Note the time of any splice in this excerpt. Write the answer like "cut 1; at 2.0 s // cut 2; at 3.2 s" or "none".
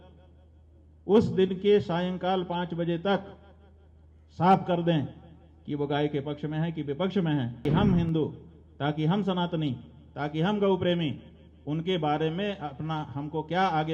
cut 1; at 7.6 s